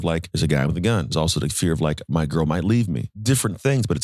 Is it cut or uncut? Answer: cut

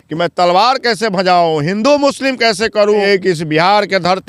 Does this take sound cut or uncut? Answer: cut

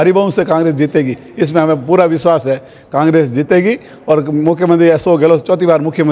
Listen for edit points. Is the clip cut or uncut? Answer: uncut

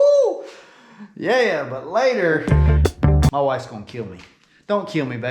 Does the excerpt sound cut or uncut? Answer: cut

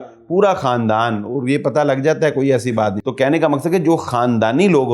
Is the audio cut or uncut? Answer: cut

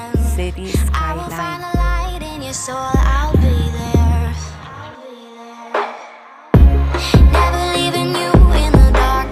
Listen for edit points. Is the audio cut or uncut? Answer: uncut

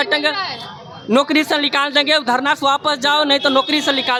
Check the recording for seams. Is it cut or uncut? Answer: uncut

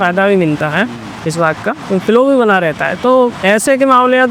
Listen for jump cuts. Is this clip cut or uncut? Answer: uncut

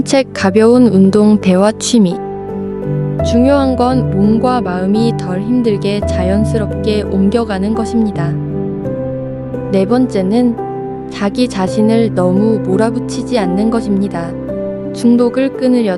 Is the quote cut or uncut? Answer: uncut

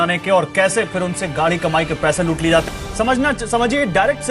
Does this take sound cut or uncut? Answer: cut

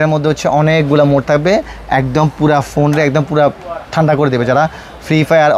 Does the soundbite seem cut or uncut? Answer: uncut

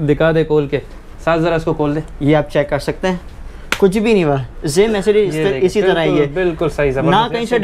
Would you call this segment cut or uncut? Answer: uncut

